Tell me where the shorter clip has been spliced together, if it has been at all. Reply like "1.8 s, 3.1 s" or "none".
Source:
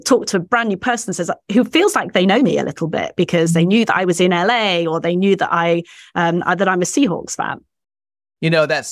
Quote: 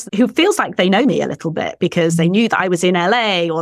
none